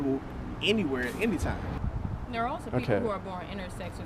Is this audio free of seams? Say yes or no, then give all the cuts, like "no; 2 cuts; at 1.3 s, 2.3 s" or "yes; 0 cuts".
no; 1 cut; at 1.7 s